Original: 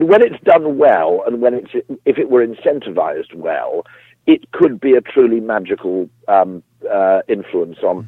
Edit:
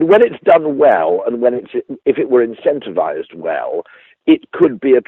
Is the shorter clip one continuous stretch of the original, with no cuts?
yes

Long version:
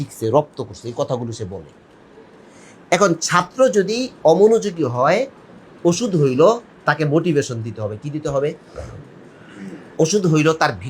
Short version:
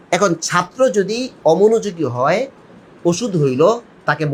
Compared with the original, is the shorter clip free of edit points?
yes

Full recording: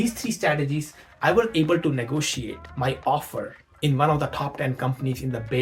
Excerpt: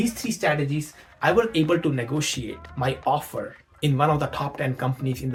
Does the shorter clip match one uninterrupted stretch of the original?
yes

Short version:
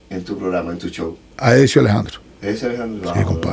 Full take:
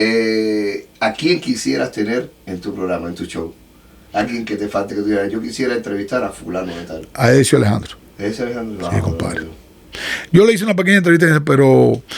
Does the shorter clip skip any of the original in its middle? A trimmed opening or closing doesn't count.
yes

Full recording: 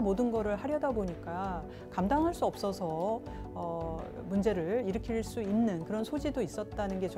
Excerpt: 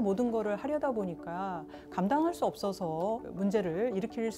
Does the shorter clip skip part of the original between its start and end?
yes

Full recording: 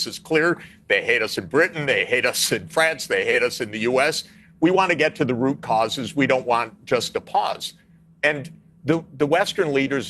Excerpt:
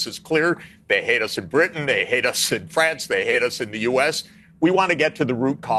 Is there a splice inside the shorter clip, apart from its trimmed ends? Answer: no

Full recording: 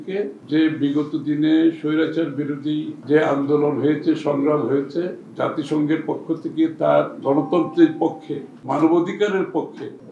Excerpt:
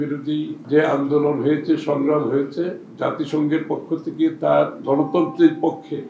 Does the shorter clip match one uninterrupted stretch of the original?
yes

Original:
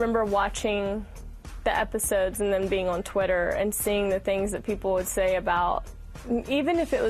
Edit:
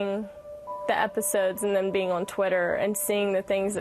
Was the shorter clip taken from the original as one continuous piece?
yes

